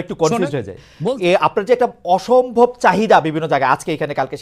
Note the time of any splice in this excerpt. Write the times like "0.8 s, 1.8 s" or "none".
1.2 s